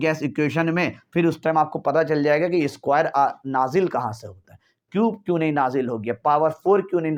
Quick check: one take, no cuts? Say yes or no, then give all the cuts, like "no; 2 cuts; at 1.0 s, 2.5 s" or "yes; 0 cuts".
yes; 0 cuts